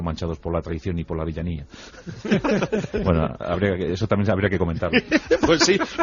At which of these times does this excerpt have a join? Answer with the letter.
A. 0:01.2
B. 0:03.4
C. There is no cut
A